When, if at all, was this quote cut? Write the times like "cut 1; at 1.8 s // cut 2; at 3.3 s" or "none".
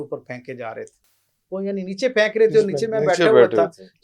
none